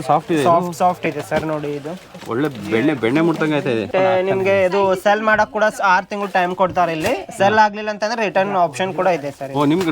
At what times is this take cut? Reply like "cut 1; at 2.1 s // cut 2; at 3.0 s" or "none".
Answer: cut 1; at 3.9 s